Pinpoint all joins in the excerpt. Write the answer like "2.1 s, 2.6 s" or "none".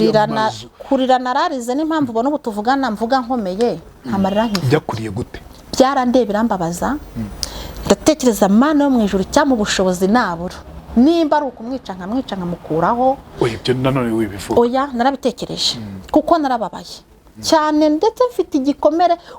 none